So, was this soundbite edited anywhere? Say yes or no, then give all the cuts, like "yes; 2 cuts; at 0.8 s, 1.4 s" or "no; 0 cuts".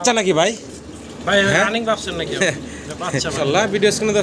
yes; 1 cut; at 3.3 s